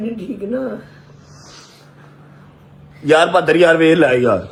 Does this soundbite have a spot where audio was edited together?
no; 0 cuts

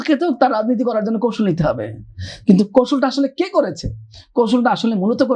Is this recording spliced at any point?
no; 0 cuts

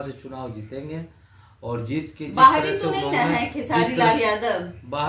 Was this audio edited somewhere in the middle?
no; 0 cuts

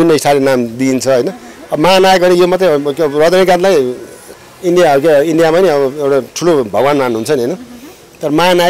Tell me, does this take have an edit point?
no; 0 cuts

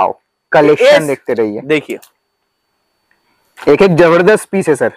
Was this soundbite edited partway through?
no; 0 cuts

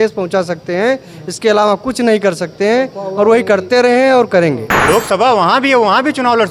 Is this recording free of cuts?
no; 1 cut; at 4.7 s

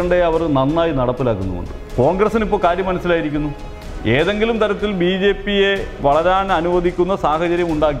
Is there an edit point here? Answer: yes; 1 cut; at 1.8 s

